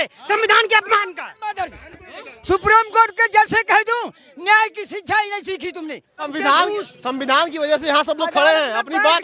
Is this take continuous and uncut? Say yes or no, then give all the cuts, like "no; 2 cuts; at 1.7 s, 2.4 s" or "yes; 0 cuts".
no; 1 cut; at 6.3 s